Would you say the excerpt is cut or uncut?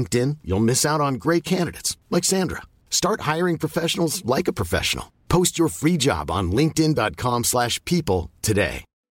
uncut